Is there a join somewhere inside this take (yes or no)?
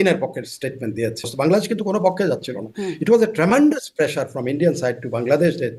yes